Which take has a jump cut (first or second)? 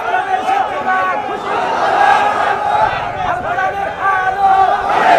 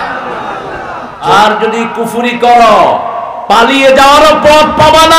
second